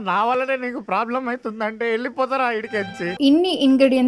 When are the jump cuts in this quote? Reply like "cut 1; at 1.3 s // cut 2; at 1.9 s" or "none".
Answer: cut 1; at 3.0 s